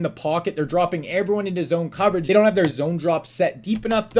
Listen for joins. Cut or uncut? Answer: cut